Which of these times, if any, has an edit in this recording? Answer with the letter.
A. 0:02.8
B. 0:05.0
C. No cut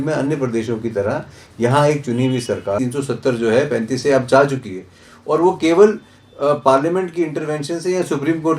A